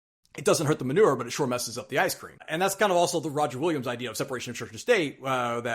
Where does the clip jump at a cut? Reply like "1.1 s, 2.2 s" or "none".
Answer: 2.3 s